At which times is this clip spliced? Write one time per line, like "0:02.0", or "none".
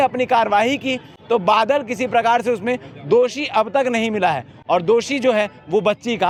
none